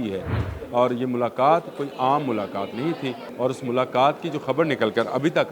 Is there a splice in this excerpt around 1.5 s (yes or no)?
no